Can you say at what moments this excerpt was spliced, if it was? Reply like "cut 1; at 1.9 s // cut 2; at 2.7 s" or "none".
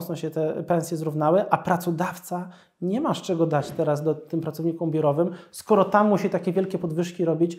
none